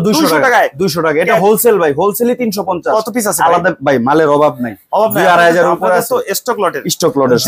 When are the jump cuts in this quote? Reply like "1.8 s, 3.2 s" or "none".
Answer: none